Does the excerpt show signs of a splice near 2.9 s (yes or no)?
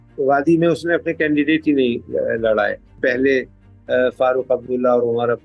yes